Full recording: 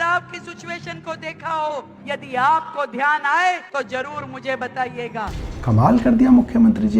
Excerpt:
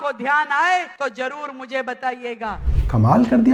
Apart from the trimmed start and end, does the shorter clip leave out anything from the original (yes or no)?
no